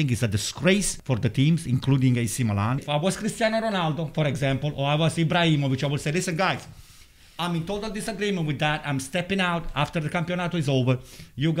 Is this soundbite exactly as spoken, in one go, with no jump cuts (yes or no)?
no